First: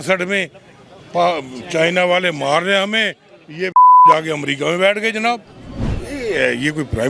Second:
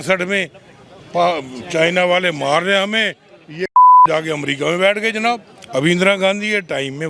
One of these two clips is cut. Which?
second; 1 cut; at 5.5 s

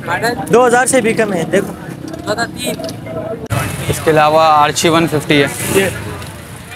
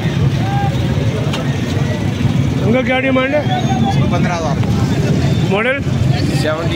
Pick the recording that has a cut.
first; 1 cut; at 3.5 s

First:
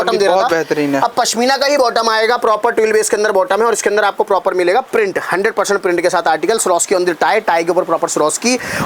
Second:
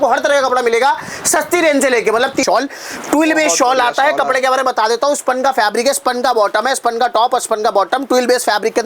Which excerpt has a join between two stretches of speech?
second; 1 cut; at 2.4 s

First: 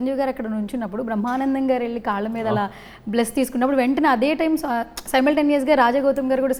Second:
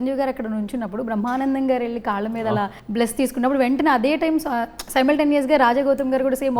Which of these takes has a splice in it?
second; 1 cut; at 2.8 s

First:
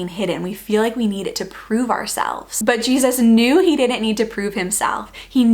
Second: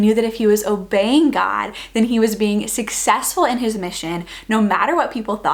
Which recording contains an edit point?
first; 1 cut; at 2.5 s

